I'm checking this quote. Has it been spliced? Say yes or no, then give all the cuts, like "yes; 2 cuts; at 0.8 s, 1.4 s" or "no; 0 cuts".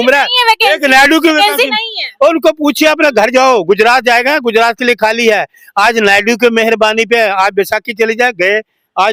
no; 0 cuts